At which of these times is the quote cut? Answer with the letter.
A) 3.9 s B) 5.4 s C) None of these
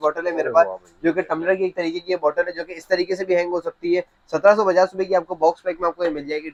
C